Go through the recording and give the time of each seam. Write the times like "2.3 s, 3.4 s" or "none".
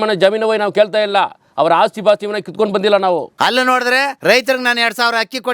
3.3 s, 4.2 s